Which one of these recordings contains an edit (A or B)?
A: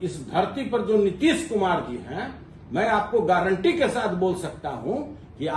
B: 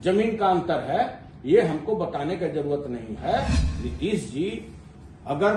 B